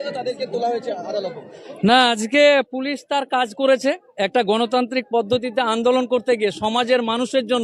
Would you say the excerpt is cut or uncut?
uncut